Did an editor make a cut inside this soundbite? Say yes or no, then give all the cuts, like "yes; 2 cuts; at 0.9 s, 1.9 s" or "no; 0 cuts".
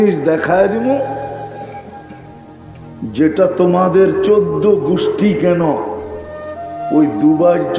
no; 0 cuts